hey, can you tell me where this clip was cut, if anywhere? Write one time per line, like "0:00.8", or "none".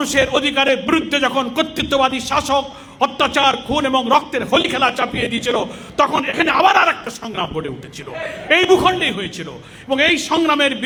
none